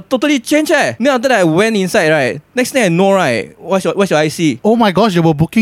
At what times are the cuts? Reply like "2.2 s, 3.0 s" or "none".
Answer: 0.9 s